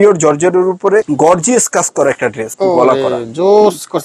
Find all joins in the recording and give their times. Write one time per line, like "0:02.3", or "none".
0:01.1
0:02.5